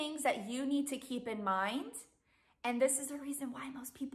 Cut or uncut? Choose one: uncut